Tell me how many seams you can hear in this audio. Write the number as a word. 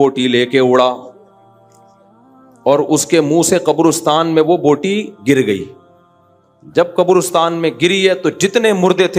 zero